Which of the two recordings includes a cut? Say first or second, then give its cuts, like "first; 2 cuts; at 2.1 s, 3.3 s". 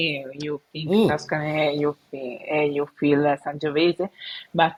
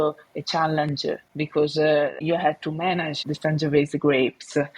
second; 3 cuts; at 1.3 s, 2.2 s, 3.2 s